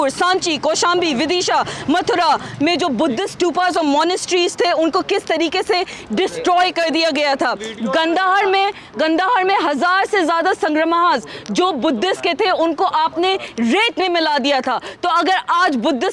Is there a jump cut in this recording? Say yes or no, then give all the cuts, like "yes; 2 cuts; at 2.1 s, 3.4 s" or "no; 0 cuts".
no; 0 cuts